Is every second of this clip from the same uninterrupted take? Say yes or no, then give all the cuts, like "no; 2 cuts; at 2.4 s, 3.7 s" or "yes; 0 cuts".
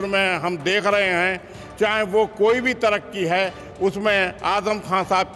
yes; 0 cuts